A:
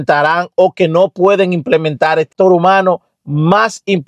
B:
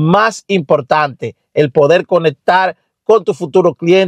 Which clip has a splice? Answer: A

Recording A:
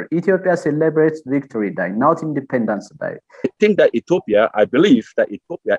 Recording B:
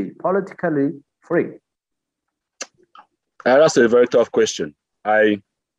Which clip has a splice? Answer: A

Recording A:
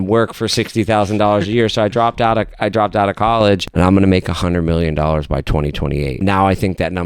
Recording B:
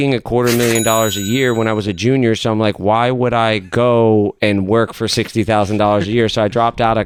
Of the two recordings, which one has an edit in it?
A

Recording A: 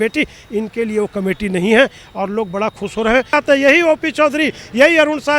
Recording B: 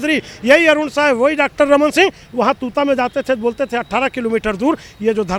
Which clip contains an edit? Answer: A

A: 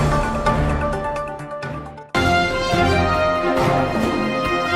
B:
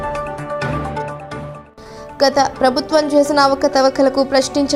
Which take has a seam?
A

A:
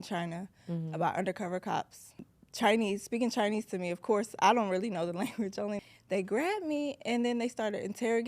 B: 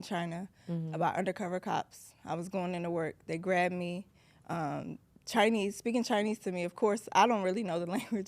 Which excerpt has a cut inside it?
A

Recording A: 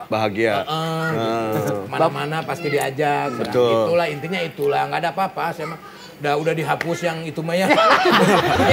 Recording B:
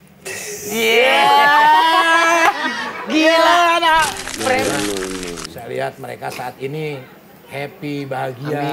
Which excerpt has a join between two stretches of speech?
B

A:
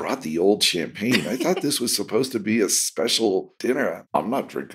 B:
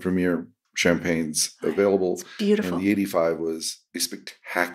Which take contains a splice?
A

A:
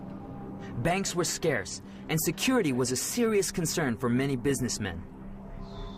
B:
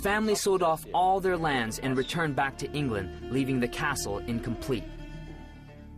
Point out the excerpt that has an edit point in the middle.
B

